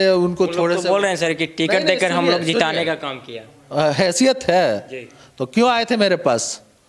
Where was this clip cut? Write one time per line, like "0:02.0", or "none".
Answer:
none